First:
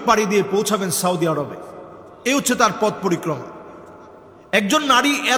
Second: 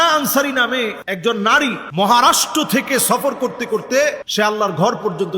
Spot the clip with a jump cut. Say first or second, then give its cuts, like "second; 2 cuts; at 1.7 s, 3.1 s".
second; 3 cuts; at 1.1 s, 1.8 s, 4.2 s